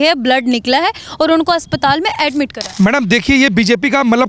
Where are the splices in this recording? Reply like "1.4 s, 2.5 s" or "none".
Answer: 2.6 s